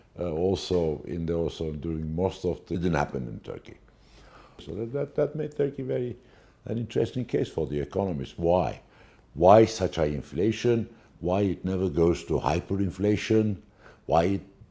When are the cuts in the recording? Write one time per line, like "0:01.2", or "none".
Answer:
none